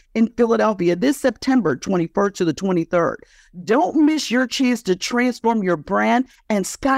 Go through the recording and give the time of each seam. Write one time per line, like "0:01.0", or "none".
none